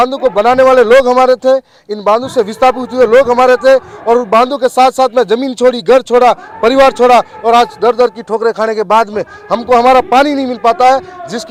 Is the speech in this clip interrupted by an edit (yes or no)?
no